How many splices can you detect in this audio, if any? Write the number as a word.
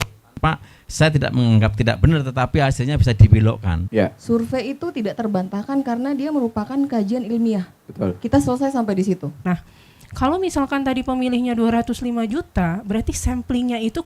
two